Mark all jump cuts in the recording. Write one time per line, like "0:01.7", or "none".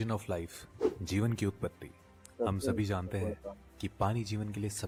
none